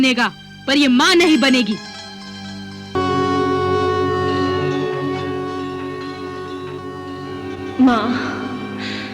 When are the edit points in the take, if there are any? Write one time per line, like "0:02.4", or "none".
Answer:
0:02.9